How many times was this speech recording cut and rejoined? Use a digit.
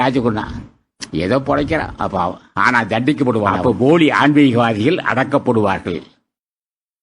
1